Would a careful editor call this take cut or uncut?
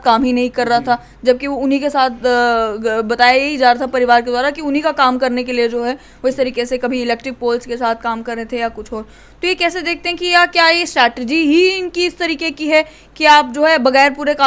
uncut